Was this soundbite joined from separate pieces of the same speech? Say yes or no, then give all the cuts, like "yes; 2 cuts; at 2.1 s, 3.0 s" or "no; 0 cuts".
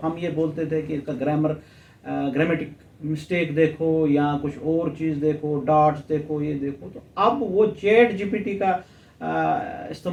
no; 0 cuts